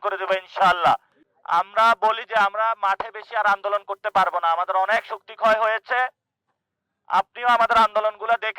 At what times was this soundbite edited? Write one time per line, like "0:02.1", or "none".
0:01.2